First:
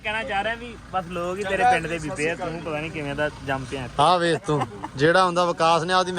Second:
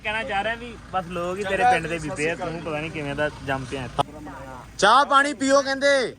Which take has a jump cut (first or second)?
second